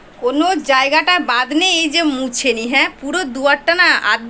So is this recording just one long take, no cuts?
yes; 0 cuts

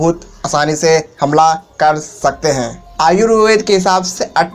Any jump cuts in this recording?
yes; 1 cut; at 2.8 s

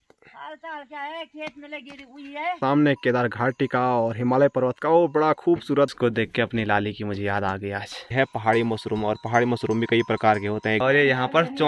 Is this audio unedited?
no; 4 cuts; at 2.6 s, 5.9 s, 8.1 s, 10.8 s

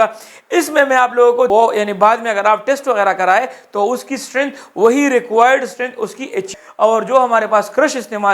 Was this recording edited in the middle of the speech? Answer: yes; 2 cuts; at 1.5 s, 6.5 s

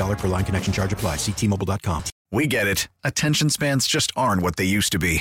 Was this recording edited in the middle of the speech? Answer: yes; 1 cut; at 2.1 s

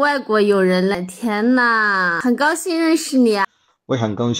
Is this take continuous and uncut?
no; 3 cuts; at 1.0 s, 2.1 s, 3.4 s

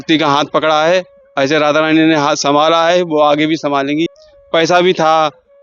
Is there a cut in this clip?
yes; 1 cut; at 4.1 s

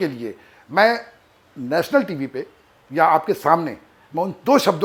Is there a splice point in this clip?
no; 0 cuts

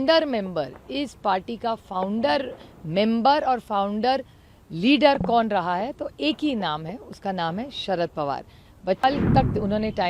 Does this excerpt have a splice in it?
yes; 1 cut; at 9.0 s

